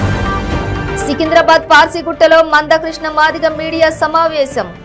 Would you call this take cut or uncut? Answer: cut